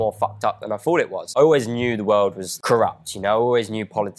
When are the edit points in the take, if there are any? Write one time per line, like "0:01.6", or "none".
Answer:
0:01.2
0:02.5